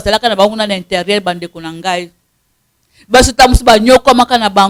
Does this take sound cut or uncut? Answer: uncut